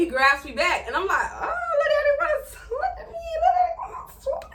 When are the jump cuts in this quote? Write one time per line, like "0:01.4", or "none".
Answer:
none